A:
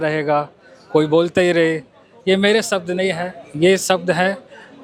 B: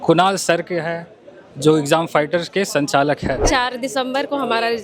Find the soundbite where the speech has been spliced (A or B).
B